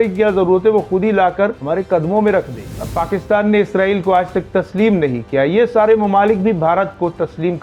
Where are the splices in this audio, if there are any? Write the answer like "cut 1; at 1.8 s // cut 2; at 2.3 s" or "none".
cut 1; at 1.6 s // cut 2; at 2.8 s